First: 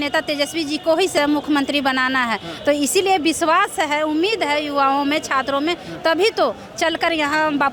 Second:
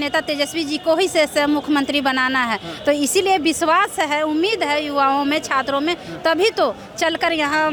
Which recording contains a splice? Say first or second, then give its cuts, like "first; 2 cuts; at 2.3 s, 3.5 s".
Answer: first; 1 cut; at 1.1 s